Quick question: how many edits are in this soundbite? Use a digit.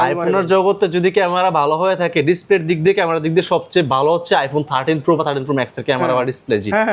0